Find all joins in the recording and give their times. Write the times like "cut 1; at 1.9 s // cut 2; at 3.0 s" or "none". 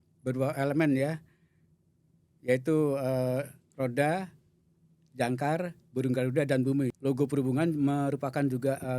cut 1; at 6.9 s